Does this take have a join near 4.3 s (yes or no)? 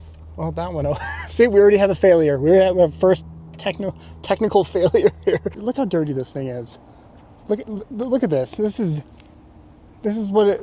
no